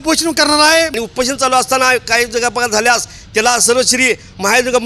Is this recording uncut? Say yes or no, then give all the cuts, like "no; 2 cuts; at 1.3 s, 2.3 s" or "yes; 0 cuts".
no; 1 cut; at 0.9 s